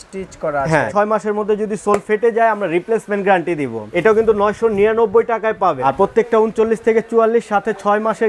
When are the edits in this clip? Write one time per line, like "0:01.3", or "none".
0:00.9
0:03.8
0:05.8